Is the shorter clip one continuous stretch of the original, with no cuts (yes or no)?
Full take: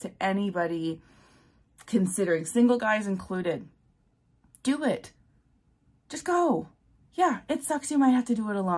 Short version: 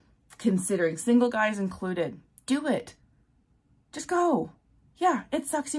no